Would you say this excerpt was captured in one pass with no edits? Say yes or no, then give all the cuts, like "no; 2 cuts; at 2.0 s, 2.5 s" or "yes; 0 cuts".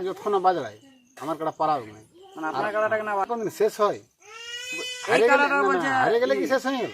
no; 1 cut; at 3.4 s